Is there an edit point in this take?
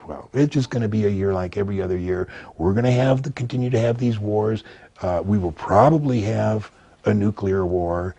no; 0 cuts

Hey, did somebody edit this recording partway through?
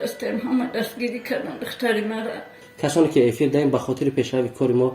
yes; 1 cut; at 2.7 s

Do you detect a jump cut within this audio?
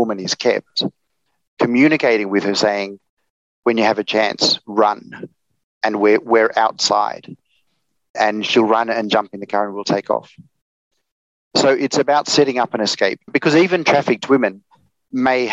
yes; 2 cuts; at 8.1 s, 13.3 s

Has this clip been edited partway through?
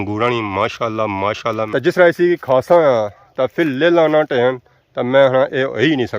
yes; 1 cut; at 1.6 s

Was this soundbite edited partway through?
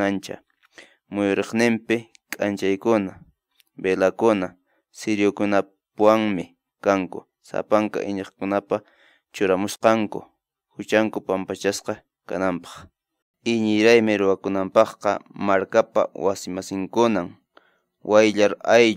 yes; 1 cut; at 13.2 s

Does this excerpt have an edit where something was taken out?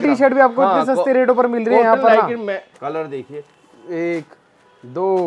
yes; 1 cut; at 2.7 s

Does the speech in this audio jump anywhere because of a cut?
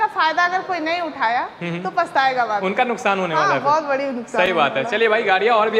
no; 0 cuts

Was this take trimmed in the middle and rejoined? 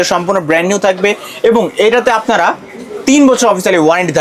no; 0 cuts

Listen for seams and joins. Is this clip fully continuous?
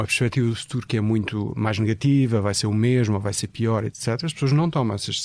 yes; 0 cuts

